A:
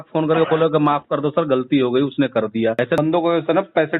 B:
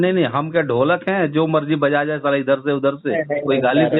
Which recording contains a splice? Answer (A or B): A